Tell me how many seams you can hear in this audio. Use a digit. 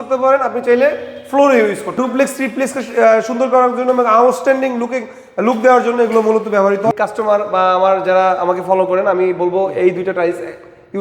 2